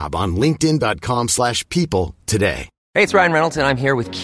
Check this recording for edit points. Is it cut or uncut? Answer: cut